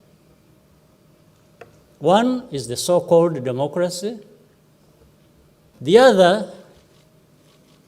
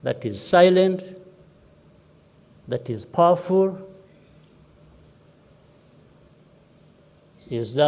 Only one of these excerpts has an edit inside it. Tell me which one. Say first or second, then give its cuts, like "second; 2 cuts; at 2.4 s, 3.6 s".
first; 1 cut; at 5.7 s